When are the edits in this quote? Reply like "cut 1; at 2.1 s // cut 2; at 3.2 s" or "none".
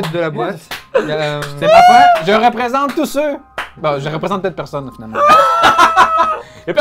none